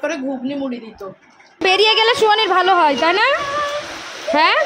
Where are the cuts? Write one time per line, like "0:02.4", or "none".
0:01.6